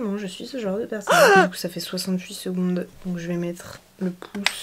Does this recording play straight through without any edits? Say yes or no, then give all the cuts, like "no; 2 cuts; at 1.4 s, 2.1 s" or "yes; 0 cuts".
yes; 0 cuts